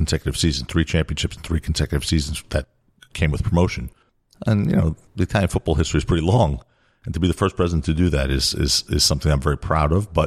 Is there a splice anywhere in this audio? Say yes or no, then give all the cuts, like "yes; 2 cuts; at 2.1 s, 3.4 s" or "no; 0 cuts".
no; 0 cuts